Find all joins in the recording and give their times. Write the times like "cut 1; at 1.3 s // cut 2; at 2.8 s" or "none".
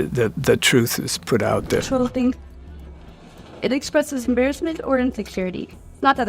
cut 1; at 1.9 s